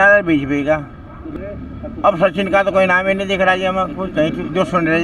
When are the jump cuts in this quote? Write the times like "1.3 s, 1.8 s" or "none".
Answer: 1.3 s